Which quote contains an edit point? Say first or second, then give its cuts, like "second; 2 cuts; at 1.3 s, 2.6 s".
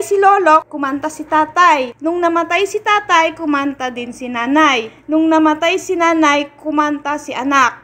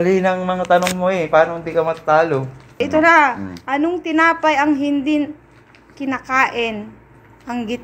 second; 1 cut; at 2.6 s